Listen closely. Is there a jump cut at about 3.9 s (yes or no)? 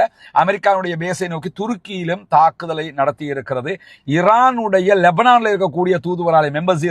yes